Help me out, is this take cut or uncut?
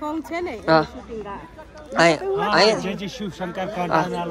uncut